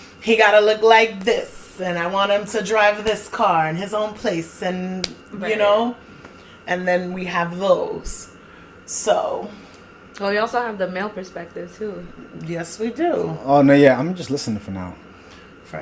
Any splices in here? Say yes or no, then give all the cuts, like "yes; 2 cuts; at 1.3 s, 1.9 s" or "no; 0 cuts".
no; 0 cuts